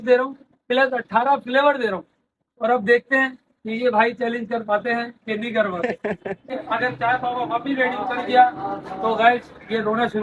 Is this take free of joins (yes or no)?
yes